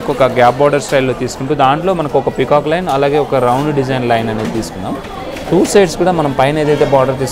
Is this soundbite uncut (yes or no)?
yes